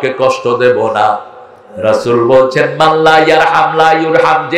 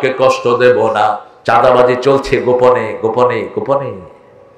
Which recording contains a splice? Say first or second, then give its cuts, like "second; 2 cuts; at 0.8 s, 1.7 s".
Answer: second; 1 cut; at 1.3 s